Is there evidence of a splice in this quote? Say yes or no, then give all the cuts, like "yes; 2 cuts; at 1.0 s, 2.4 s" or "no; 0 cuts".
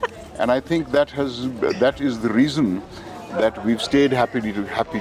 no; 0 cuts